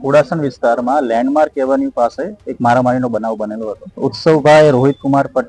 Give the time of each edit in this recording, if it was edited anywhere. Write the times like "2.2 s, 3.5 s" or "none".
4.0 s